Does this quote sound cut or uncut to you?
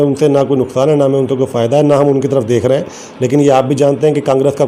uncut